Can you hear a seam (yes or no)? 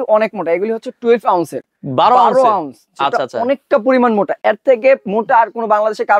no